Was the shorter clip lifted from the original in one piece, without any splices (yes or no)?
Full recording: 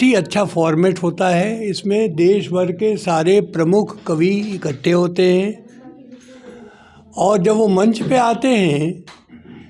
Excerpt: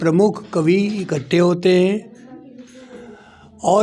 yes